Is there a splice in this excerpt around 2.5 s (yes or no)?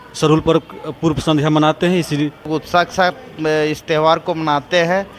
yes